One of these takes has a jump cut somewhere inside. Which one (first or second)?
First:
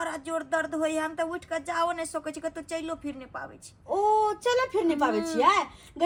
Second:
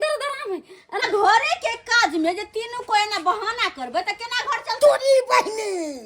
second